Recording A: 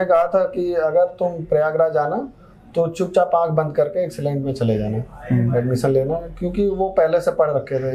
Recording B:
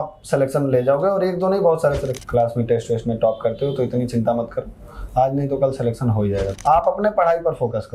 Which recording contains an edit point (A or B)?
B